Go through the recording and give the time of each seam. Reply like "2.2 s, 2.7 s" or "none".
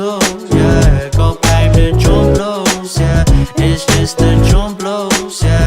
1.4 s